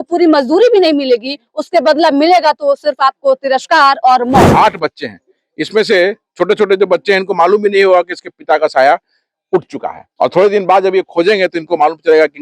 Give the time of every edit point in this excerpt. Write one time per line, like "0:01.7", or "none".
0:04.5